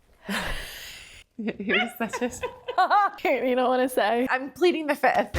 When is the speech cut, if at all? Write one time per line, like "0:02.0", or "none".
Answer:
0:03.1
0:04.3